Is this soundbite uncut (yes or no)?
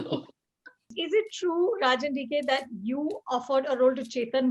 no